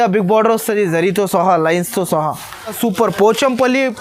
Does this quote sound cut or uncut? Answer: cut